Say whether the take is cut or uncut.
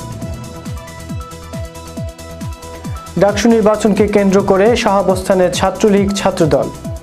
uncut